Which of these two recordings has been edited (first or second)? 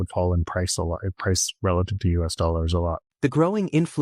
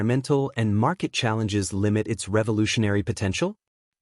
first